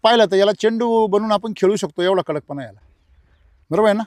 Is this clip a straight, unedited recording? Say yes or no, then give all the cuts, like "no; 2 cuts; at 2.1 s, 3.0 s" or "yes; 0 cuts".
yes; 0 cuts